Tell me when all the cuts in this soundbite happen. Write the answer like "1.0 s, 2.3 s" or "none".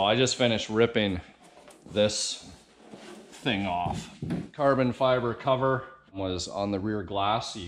4.5 s, 6.2 s